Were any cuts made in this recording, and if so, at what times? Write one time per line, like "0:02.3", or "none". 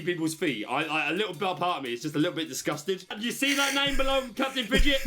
0:03.1